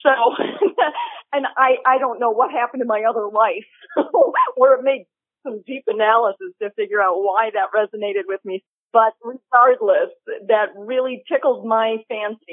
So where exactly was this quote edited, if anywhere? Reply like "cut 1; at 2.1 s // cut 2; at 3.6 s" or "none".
cut 1; at 8.6 s